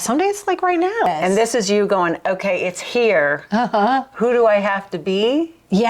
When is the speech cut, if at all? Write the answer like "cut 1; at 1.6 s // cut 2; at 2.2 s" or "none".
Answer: cut 1; at 1.1 s